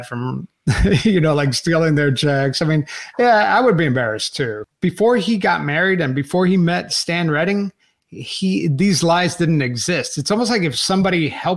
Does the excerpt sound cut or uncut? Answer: cut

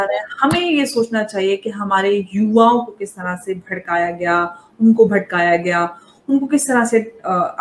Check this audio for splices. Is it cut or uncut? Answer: uncut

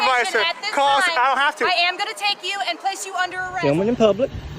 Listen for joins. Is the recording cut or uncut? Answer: cut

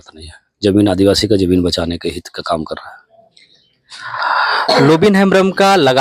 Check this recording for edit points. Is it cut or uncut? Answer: uncut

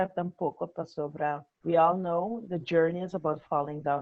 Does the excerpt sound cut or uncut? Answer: cut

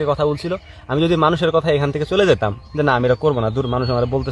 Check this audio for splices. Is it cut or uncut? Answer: uncut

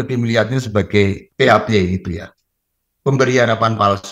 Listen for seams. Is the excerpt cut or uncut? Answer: cut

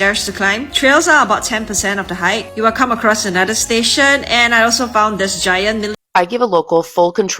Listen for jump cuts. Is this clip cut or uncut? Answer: cut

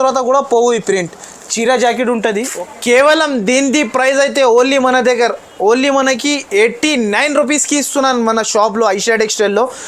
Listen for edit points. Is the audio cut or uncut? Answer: cut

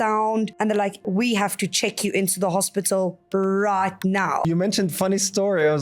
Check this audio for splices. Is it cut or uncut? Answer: cut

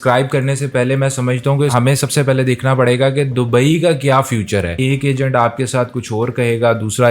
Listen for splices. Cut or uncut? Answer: cut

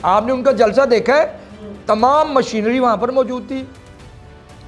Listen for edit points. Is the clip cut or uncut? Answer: uncut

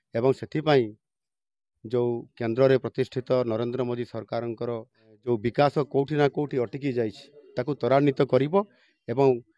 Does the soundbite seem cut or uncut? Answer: cut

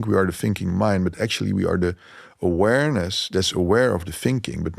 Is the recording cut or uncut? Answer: uncut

